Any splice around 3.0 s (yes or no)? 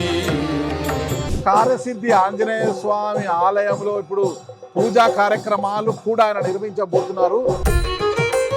no